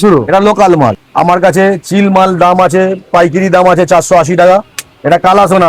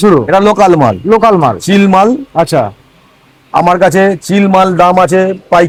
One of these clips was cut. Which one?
first; 2 cuts; at 1.0 s, 4.6 s

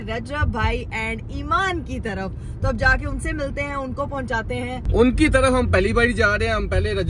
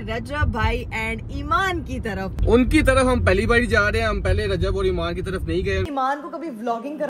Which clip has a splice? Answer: second; 2 cuts; at 2.4 s, 5.9 s

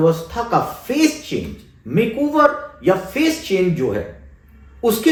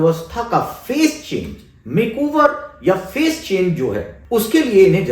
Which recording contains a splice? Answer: second; 1 cut; at 4.1 s

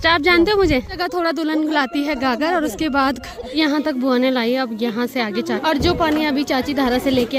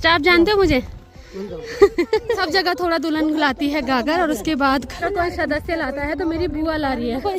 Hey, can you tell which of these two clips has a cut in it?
first; 3 cuts; at 1.0 s, 3.5 s, 5.6 s

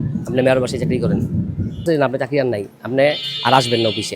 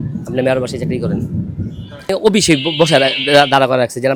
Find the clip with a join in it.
first; 1 cut; at 1.8 s

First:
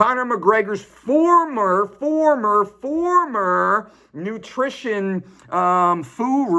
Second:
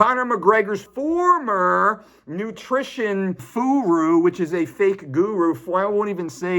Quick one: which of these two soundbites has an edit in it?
second; 2 cuts; at 0.9 s, 3.4 s

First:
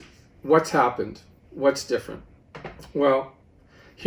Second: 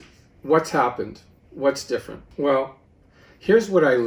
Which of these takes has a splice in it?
second; 1 cut; at 2.2 s

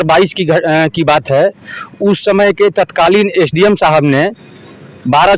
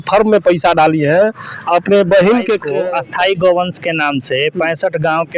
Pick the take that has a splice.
second; 1 cut; at 2.7 s

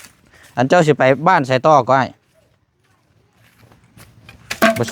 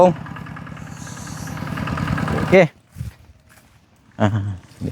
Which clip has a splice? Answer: second; 1 cut; at 2.5 s

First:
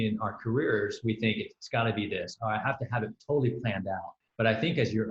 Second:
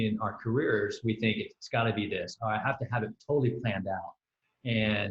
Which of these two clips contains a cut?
first; 1 cut; at 4.2 s

